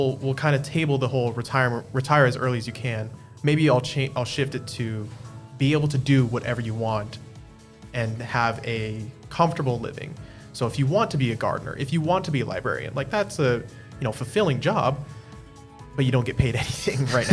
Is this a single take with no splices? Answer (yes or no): yes